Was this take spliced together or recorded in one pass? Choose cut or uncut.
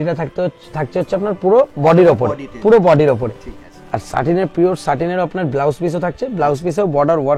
uncut